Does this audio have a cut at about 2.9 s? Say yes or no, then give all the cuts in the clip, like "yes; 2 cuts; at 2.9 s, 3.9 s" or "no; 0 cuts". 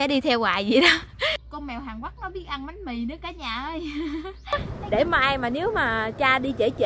no; 2 cuts; at 1.5 s, 4.5 s